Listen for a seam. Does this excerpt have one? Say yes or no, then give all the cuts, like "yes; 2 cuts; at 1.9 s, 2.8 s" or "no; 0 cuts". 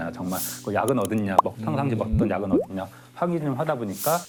no; 0 cuts